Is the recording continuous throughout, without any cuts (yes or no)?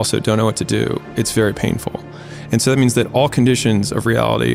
yes